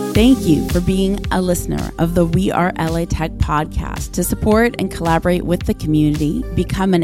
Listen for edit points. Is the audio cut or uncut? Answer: uncut